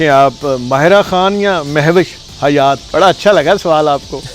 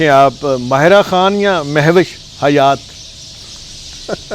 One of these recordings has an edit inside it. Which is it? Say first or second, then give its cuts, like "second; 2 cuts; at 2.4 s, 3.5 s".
first; 1 cut; at 2.8 s